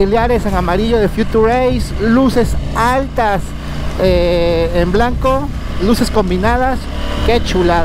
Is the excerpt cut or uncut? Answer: uncut